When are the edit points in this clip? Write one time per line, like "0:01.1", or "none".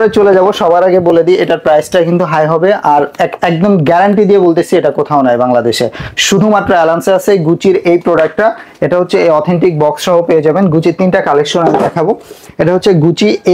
none